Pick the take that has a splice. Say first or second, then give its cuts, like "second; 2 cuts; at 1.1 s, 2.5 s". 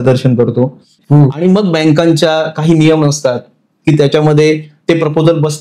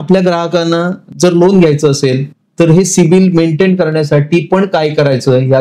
first; 1 cut; at 0.9 s